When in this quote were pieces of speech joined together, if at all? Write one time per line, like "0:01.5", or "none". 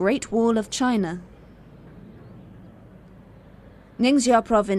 0:02.0